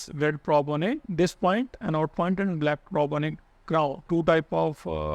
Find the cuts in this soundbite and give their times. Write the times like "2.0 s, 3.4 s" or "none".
1.1 s, 4.0 s

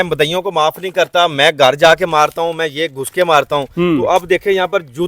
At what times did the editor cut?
none

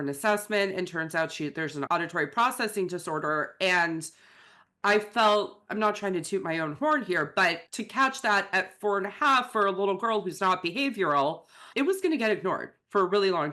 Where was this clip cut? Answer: 1.9 s, 7.6 s, 11.6 s

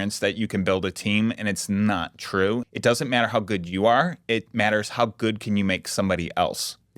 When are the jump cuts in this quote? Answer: 2.7 s

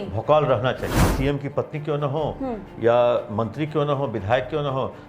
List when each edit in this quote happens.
1.1 s

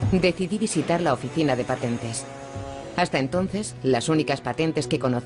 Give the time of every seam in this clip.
1.5 s

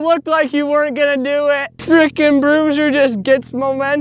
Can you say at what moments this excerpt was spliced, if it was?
1.7 s

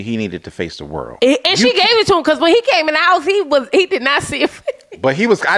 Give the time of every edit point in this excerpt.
1.1 s

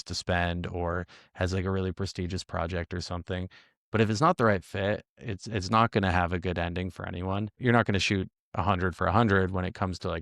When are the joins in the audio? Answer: 7.5 s

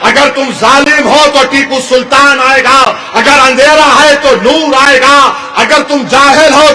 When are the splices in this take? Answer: none

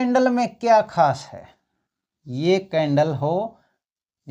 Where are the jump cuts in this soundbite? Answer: none

